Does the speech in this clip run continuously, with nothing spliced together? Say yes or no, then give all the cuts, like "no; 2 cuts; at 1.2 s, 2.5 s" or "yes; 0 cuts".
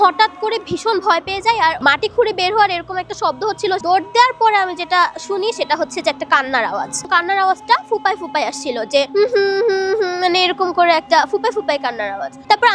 no; 3 cuts; at 1.8 s, 3.8 s, 7.0 s